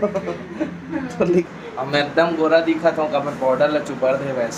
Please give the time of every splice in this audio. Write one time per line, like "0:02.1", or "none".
0:01.3